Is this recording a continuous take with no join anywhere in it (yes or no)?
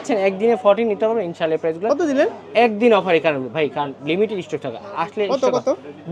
yes